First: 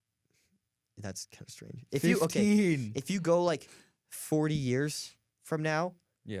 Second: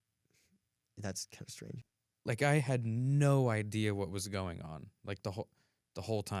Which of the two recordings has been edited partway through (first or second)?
second